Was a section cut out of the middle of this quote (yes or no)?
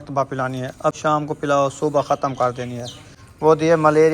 yes